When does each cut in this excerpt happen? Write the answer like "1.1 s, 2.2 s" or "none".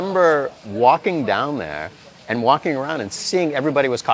none